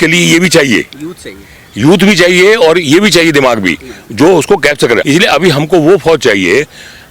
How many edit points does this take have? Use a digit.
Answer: 1